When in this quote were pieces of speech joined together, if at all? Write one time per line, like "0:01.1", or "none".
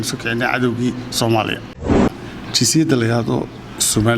0:02.1